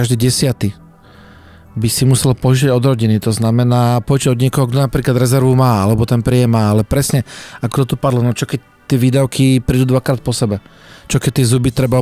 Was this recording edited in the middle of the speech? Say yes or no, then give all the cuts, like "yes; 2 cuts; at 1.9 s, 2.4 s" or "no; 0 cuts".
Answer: no; 0 cuts